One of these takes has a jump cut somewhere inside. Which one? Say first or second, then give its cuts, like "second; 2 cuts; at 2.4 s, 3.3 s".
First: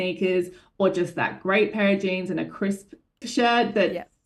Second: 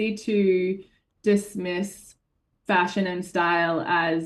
first; 1 cut; at 3.2 s